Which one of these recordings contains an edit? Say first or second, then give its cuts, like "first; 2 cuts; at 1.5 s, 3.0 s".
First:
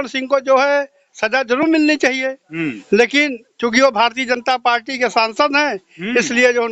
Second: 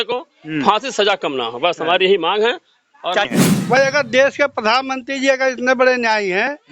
second; 1 cut; at 3.6 s